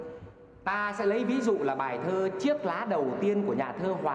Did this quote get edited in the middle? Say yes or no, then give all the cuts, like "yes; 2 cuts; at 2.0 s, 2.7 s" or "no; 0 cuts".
no; 0 cuts